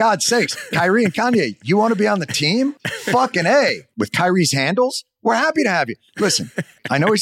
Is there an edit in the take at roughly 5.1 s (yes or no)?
no